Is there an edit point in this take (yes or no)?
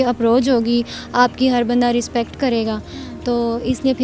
no